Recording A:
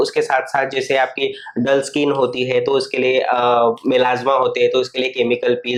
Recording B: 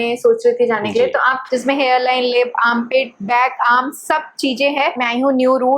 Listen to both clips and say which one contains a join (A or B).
B